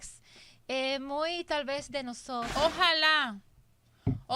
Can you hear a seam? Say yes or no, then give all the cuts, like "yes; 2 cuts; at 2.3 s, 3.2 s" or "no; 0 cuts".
yes; 1 cut; at 2.5 s